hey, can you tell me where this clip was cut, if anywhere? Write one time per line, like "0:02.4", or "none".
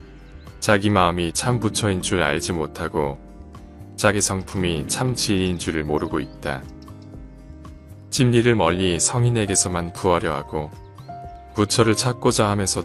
none